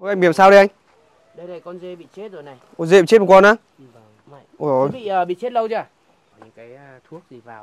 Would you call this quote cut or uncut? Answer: cut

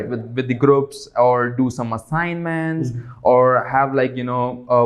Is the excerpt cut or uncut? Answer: uncut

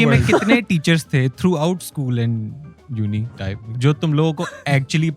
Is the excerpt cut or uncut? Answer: cut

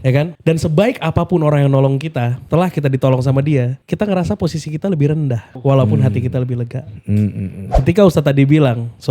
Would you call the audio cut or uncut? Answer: cut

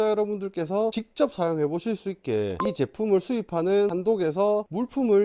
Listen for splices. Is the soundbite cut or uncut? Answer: uncut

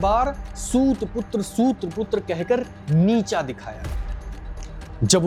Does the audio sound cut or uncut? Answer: uncut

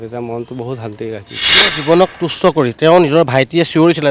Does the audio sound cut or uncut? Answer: cut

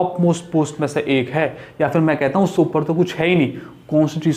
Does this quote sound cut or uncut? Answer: uncut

